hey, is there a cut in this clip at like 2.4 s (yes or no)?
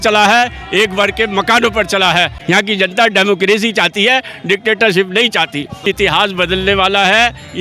yes